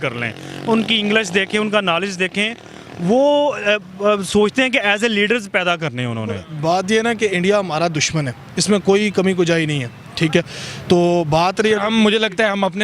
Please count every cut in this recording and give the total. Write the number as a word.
one